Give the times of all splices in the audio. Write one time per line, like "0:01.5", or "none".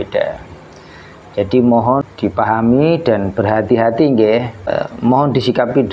0:02.0
0:04.7